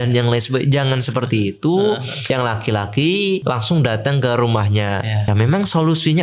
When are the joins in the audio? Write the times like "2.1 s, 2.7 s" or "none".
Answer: 2.1 s, 3.4 s, 5.2 s